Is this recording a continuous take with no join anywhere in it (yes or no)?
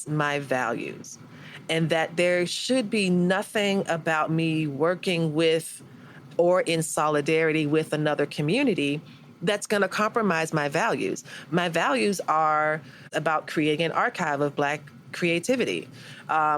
no